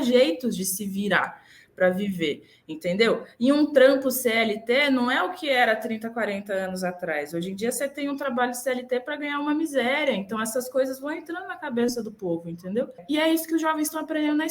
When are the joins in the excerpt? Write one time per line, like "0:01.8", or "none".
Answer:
0:13.0

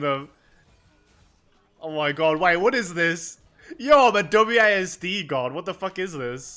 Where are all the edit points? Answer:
none

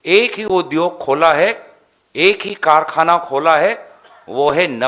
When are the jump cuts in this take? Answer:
none

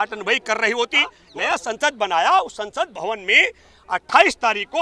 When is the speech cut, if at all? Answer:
0:01.2

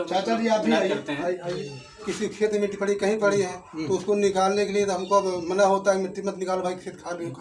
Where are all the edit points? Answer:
0:02.1

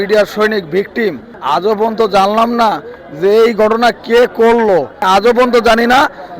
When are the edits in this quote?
0:01.3
0:05.0

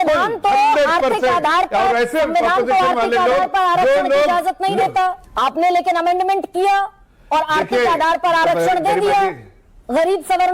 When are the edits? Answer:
0:05.2

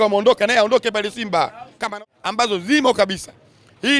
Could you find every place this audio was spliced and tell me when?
0:01.9

